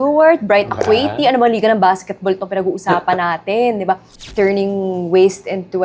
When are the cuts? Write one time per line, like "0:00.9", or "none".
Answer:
0:04.2

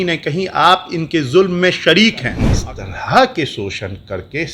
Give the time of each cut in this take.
0:02.5

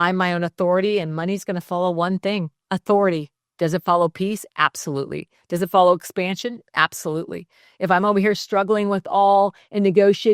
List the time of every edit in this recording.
0:02.6
0:03.4

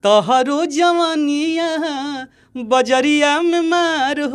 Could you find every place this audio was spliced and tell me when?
none

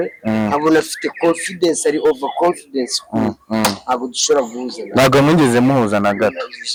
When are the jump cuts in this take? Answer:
none

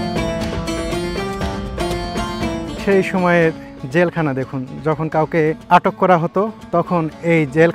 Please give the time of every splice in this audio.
0:02.7
0:05.6
0:06.6

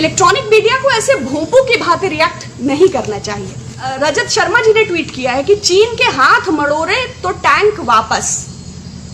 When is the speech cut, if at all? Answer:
0:03.9

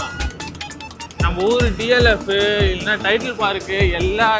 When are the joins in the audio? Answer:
none

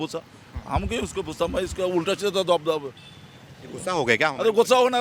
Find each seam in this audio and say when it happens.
none

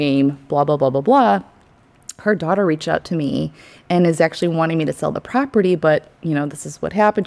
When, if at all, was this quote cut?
none

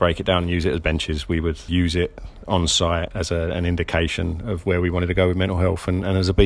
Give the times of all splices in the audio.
0:01.7
0:03.1

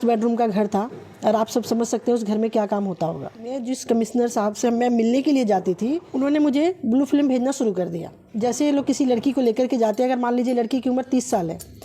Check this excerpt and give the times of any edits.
0:03.6
0:06.0
0:08.2

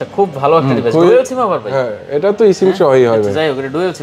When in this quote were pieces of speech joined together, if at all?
none

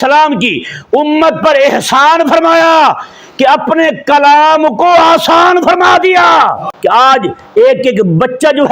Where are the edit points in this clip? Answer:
0:06.7

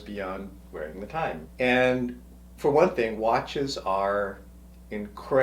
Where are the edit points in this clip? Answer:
0:01.4

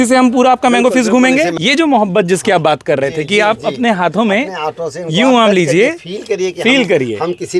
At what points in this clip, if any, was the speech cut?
0:01.5

